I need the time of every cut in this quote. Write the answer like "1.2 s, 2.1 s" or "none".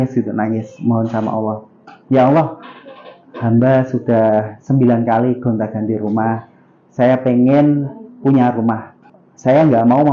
9.0 s